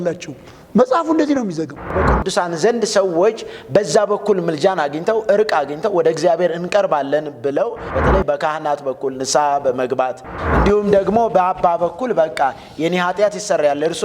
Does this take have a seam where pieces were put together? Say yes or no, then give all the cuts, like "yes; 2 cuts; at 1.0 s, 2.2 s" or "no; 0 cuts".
yes; 3 cuts; at 1.9 s, 7.9 s, 10.3 s